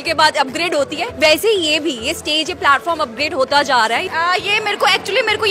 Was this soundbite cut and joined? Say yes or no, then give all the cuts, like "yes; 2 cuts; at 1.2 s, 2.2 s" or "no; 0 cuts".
yes; 2 cuts; at 1.0 s, 4.1 s